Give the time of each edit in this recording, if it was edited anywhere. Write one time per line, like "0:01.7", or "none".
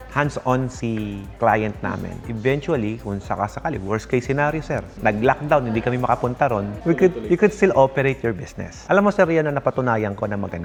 none